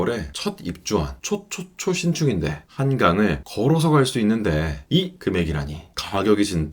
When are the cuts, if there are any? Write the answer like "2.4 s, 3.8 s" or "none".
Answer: none